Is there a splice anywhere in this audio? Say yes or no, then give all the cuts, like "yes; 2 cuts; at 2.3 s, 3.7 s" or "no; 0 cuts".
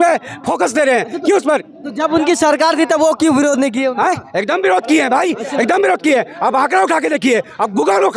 no; 0 cuts